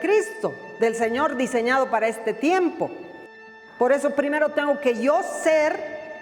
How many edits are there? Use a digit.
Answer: 1